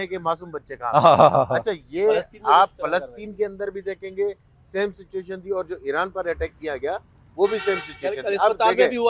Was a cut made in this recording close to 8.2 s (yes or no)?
no